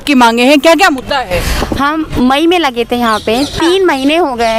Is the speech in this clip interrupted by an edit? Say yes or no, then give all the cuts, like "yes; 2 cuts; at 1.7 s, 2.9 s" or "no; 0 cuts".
no; 0 cuts